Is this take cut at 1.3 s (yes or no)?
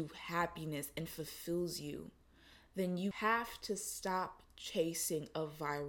no